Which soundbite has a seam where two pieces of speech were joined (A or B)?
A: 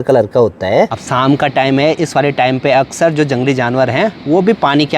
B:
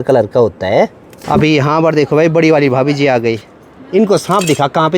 A